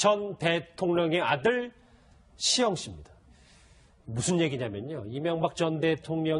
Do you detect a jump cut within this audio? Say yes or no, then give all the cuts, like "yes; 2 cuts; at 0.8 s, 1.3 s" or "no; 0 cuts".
no; 0 cuts